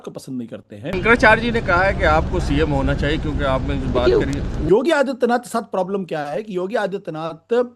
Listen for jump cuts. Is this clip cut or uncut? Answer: cut